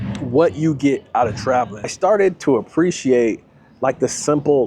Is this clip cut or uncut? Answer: cut